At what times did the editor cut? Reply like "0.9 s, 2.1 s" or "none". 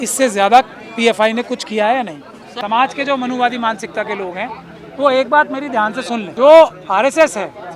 2.5 s, 6.3 s